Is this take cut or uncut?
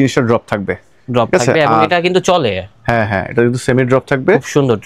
uncut